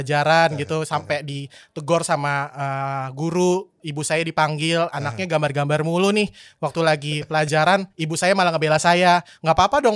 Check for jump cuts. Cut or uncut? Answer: uncut